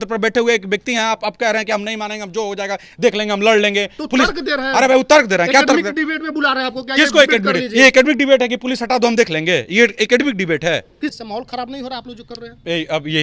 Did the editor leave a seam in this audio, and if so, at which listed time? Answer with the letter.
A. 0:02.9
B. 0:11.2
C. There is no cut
B